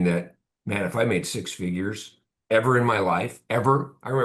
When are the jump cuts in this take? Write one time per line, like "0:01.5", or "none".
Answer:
none

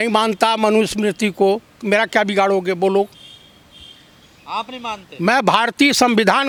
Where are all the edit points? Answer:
none

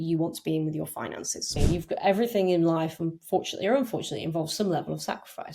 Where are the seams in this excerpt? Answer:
0:01.5

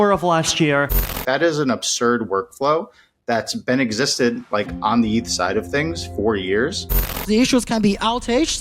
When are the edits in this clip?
0:00.9
0:07.2

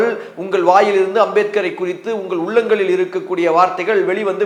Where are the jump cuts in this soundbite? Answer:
none

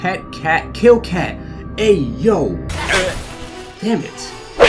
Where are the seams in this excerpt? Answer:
0:02.7

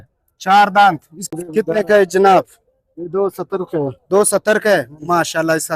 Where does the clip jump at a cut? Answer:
0:01.3

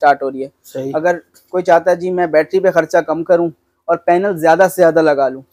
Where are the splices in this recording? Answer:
none

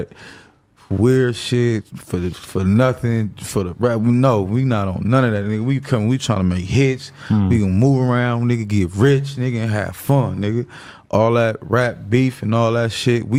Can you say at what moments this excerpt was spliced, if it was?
none

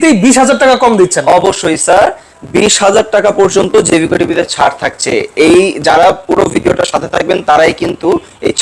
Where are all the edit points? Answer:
none

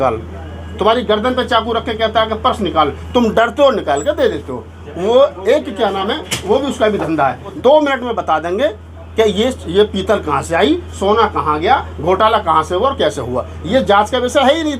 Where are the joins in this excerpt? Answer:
0:07.5

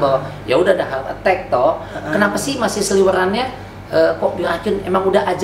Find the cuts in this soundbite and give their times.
none

